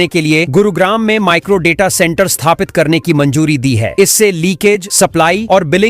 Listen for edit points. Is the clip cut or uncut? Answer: uncut